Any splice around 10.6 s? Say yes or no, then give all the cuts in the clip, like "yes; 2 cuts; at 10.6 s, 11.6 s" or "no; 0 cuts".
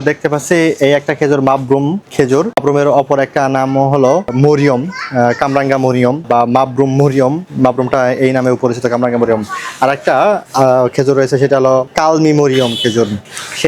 no; 3 cuts; at 2.6 s, 4.3 s, 6.3 s